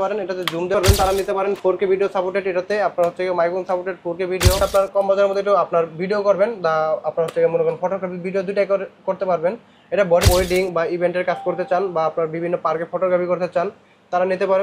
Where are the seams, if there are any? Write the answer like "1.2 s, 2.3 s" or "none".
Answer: 0.7 s, 4.6 s, 10.2 s